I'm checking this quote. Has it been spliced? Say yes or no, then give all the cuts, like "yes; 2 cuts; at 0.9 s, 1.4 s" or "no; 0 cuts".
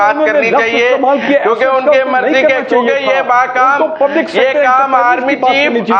no; 0 cuts